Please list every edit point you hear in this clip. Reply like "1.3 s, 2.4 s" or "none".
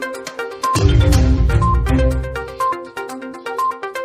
2.8 s